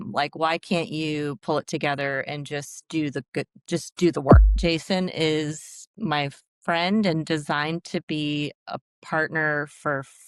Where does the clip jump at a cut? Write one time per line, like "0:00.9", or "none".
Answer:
0:04.5